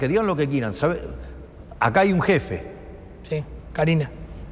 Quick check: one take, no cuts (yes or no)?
yes